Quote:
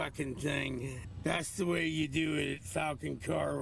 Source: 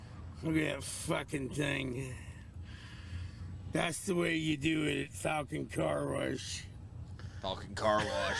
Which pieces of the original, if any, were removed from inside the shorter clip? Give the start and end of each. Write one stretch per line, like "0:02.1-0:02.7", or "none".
0:02.2-0:03.5